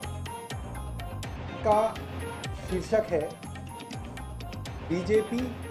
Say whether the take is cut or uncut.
cut